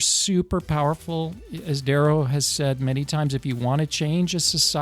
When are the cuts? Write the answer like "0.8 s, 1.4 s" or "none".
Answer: 1.5 s